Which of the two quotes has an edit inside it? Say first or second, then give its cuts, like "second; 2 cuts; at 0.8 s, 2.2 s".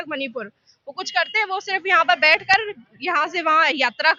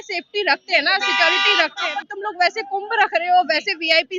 second; 1 cut; at 1.8 s